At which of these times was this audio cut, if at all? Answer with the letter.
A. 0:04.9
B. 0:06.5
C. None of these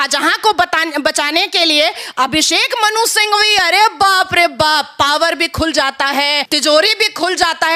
B